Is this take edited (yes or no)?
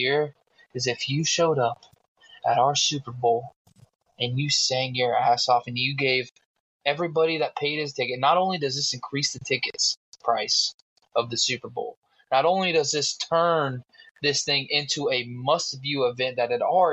no